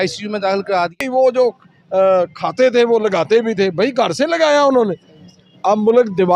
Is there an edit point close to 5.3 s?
no; 1 cut; at 1.0 s

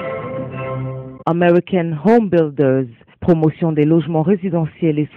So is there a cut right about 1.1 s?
yes; 1 cut; at 1.1 s

